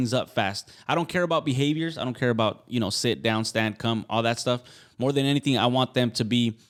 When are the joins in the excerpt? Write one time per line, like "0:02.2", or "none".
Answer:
none